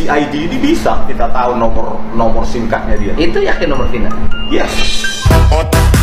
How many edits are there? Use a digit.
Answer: 0